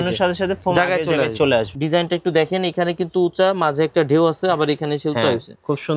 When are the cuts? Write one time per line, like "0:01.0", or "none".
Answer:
0:01.8